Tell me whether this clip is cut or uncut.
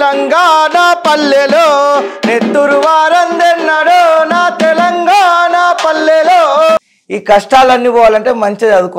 cut